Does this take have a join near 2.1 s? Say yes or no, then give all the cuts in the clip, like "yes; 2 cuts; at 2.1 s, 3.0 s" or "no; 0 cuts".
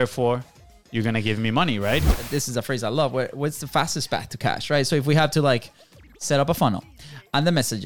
yes; 1 cut; at 2.1 s